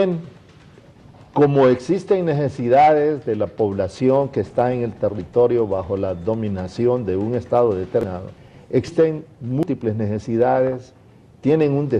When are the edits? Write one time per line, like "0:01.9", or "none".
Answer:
0:06.5

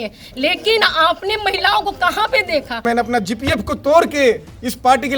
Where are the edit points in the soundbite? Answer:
0:02.8

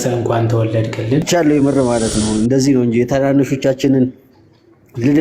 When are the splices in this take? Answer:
0:01.2

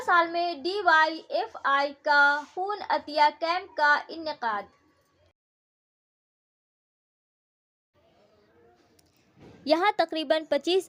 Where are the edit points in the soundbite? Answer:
none

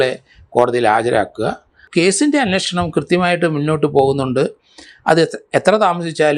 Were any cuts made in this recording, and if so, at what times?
0:01.8

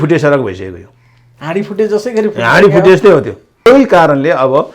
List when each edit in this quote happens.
0:03.7

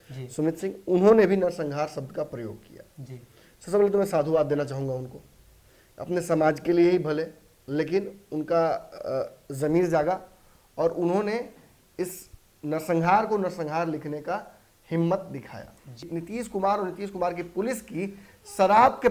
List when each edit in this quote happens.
0:16.1

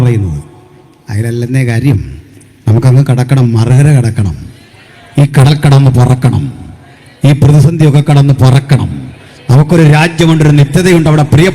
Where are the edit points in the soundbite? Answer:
none

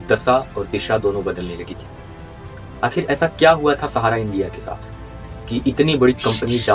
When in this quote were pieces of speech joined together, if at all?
none

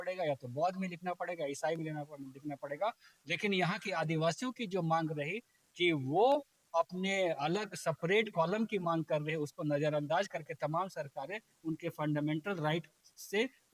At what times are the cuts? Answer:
none

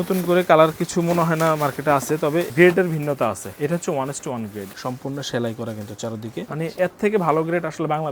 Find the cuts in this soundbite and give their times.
0:02.5
0:03.5
0:04.7
0:06.5

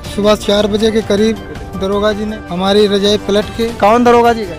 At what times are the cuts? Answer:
0:02.4

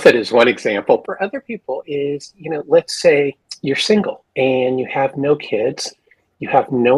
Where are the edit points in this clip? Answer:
0:01.0
0:03.5
0:04.2

